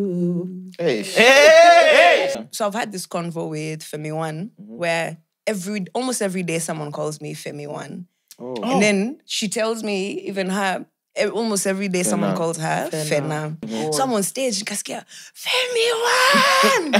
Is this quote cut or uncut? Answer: cut